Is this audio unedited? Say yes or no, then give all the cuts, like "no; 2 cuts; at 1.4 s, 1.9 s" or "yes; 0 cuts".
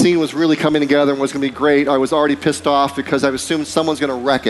yes; 0 cuts